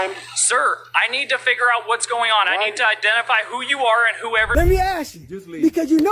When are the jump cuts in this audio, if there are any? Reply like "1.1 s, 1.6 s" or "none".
4.5 s